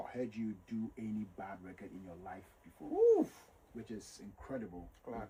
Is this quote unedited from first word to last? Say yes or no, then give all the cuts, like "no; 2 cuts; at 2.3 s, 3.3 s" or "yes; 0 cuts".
yes; 0 cuts